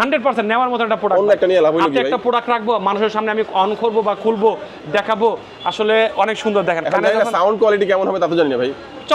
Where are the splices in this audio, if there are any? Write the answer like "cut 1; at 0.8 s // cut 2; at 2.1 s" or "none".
none